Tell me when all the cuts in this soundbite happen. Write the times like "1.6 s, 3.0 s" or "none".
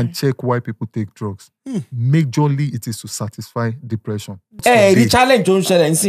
4.6 s